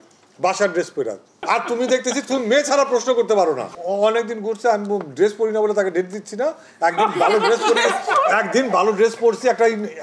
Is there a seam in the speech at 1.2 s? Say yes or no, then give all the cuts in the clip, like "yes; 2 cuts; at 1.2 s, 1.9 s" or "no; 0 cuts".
no; 1 cut; at 3.7 s